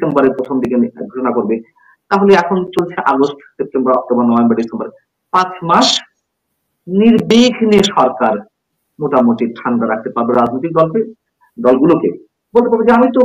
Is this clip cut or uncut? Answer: uncut